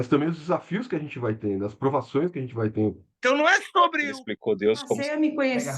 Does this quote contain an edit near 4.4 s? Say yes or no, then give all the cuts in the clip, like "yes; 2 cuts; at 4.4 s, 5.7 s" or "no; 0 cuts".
no; 1 cut; at 3.1 s